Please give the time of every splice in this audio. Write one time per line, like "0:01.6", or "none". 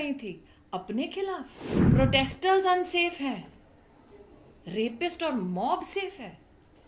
0:02.0